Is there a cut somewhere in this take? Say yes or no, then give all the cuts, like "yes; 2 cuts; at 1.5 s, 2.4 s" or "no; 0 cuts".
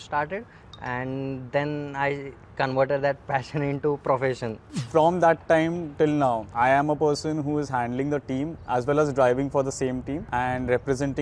yes; 4 cuts; at 4.8 s, 6.5 s, 8.6 s, 10.2 s